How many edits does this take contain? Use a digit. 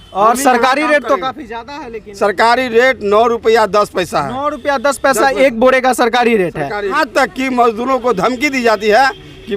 1